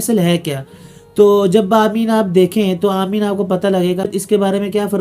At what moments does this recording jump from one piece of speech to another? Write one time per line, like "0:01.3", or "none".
0:04.1